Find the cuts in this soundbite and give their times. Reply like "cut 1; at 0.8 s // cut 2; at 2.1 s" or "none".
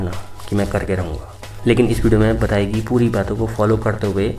none